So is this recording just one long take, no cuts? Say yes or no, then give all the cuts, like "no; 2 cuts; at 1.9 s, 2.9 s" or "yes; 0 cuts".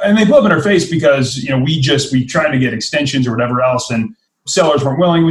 no; 1 cut; at 4.4 s